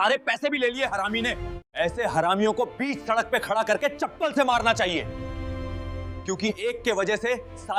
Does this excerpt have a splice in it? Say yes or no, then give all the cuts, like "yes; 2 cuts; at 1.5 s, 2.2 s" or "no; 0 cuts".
no; 0 cuts